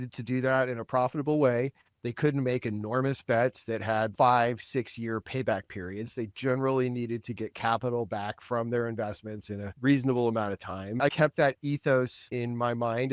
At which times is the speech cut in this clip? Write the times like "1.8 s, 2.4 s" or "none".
4.1 s, 11.1 s, 12.2 s

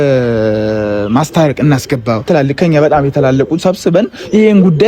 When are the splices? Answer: 2.2 s

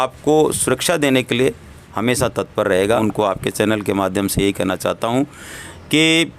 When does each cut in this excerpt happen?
3.0 s

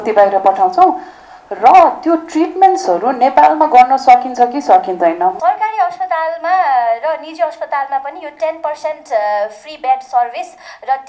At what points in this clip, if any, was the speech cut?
5.4 s

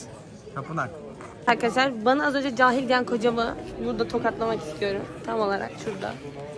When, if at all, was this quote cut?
1.4 s

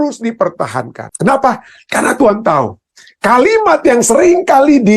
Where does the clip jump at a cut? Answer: 1.0 s

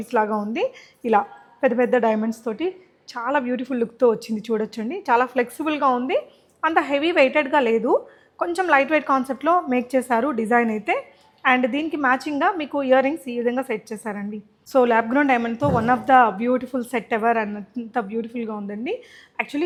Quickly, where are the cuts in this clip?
none

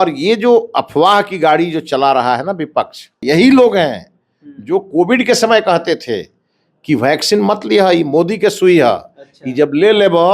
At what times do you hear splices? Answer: 3.2 s

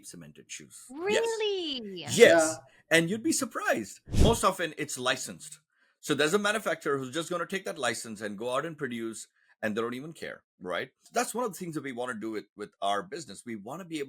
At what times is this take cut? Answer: 4.1 s, 11.0 s

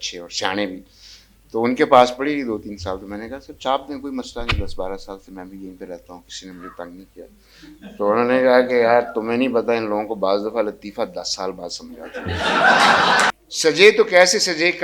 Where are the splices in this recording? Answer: 13.3 s

